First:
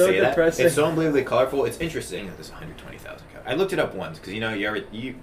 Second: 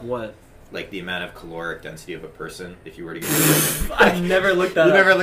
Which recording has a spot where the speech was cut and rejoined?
first; 1 cut; at 2.2 s

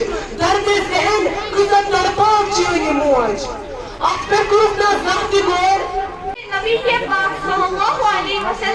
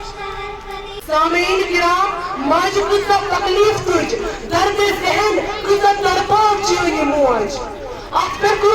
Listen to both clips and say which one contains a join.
second; 1 cut; at 1.0 s

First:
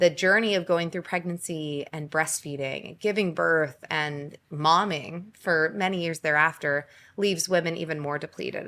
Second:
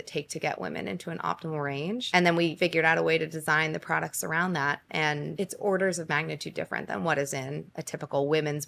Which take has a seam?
second; 3 cuts; at 2.0 s, 2.5 s, 5.3 s

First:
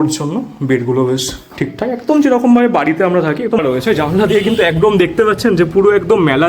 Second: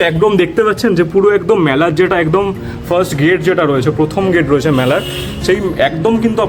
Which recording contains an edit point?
first; 1 cut; at 3.6 s

